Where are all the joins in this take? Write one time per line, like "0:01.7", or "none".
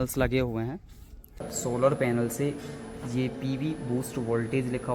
0:01.5